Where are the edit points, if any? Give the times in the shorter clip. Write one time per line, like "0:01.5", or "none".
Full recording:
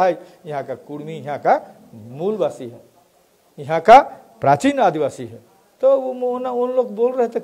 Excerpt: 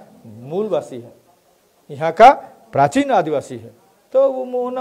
none